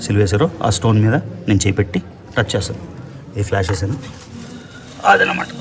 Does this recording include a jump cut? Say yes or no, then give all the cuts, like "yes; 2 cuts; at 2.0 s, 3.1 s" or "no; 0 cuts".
no; 0 cuts